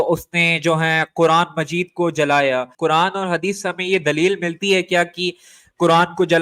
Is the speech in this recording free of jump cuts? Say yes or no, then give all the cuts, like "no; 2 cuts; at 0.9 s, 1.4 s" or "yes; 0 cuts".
no; 1 cut; at 2.7 s